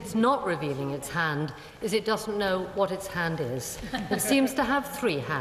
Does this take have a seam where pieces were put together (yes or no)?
no